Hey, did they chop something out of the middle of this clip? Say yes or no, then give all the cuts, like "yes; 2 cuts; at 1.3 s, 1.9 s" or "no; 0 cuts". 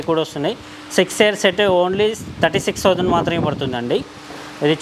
no; 0 cuts